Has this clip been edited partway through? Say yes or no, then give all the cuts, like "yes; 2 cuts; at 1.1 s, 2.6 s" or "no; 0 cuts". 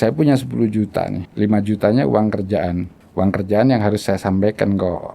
yes; 2 cuts; at 1.2 s, 3.0 s